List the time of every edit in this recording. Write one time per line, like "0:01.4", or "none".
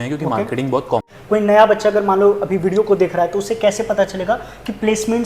0:01.1